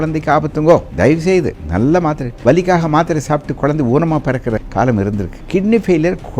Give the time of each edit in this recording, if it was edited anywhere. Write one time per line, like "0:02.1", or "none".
0:01.3
0:02.3
0:04.7
0:05.4